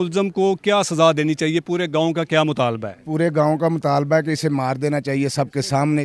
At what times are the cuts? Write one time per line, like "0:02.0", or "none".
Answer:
none